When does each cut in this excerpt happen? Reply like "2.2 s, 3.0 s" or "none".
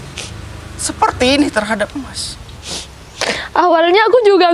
2.4 s